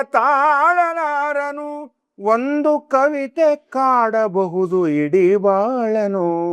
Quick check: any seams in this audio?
no; 0 cuts

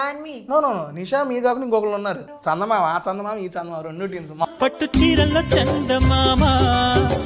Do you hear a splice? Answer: yes; 2 cuts; at 2.3 s, 4.5 s

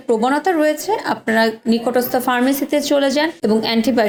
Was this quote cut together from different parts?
no; 0 cuts

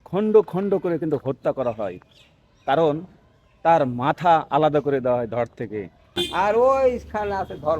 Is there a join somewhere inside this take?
yes; 1 cut; at 6.2 s

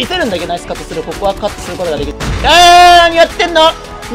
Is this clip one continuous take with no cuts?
no; 1 cut; at 2.2 s

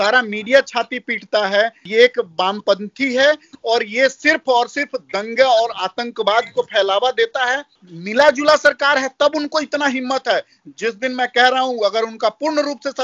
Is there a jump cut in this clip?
yes; 2 cuts; at 1.8 s, 7.7 s

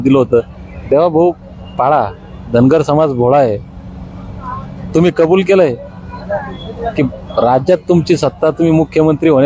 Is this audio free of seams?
yes; 0 cuts

